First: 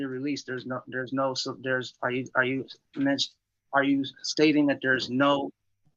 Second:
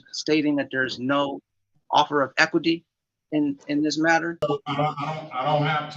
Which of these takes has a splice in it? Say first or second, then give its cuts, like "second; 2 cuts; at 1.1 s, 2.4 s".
second; 1 cut; at 4.4 s